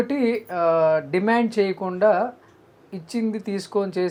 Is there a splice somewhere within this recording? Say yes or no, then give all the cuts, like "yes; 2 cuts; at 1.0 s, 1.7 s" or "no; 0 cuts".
no; 0 cuts